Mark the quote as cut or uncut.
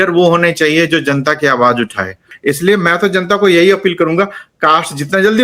cut